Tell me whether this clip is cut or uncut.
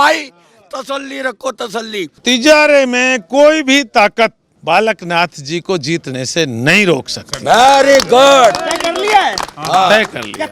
cut